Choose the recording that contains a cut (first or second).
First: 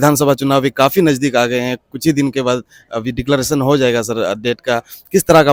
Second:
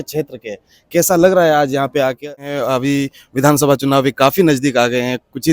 second